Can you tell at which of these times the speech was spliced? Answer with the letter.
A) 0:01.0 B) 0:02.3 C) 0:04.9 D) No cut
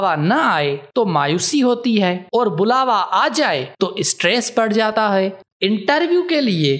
C